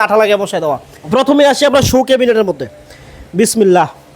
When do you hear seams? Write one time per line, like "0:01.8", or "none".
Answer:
0:00.9